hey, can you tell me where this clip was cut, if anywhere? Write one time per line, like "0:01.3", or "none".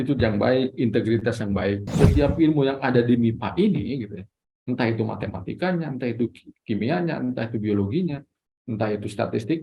0:01.8